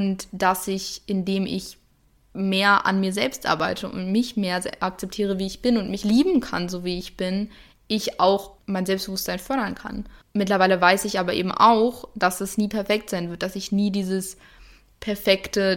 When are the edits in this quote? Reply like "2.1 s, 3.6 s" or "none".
5.9 s, 8.5 s, 10.1 s